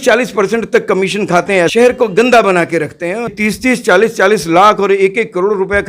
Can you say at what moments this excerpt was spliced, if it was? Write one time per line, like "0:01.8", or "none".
0:01.7
0:03.3